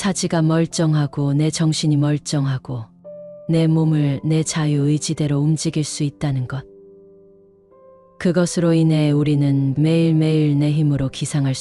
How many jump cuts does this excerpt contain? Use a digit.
2